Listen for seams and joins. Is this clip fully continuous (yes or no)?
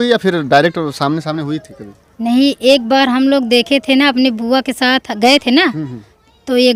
yes